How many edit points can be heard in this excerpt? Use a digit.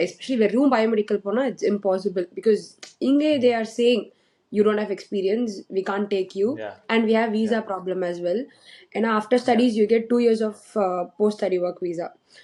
0